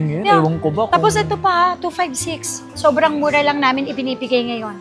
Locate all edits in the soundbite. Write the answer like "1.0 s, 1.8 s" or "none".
none